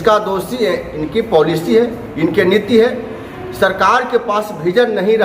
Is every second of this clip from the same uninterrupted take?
yes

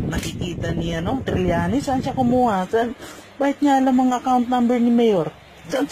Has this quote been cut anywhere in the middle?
no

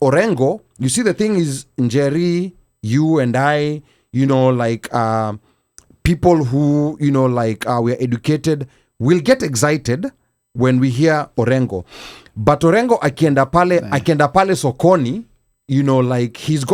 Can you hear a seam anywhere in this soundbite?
no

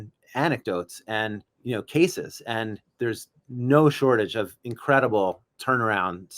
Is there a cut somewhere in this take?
yes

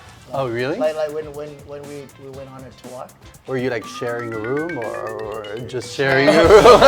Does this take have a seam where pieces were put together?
yes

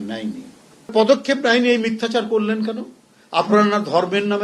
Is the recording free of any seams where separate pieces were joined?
no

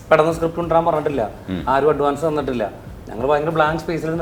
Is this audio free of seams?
yes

